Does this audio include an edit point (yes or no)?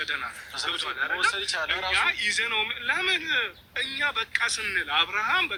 no